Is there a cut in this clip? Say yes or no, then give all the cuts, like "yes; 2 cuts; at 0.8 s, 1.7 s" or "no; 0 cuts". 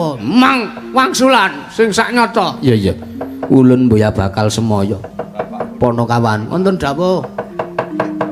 no; 0 cuts